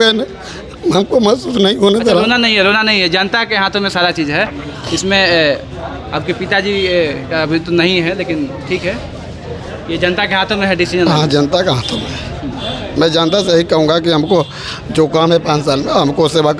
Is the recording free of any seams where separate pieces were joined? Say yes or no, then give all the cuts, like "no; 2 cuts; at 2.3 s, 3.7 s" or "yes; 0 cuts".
yes; 0 cuts